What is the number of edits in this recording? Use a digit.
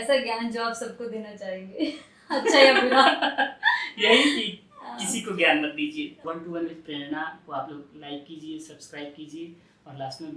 1